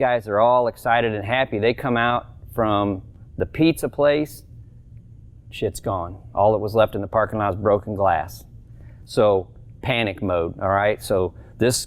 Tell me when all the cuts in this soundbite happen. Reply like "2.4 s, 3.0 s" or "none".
none